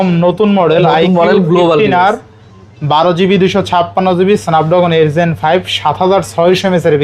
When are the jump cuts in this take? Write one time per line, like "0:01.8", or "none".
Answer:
none